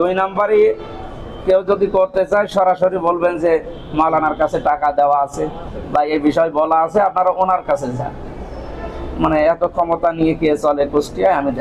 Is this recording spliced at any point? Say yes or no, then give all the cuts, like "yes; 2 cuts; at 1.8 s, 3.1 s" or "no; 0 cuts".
no; 0 cuts